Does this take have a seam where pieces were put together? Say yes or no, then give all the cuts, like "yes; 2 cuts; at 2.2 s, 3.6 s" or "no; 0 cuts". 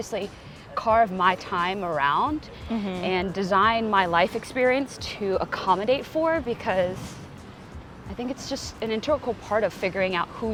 no; 0 cuts